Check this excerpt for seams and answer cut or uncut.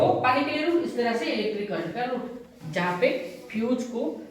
cut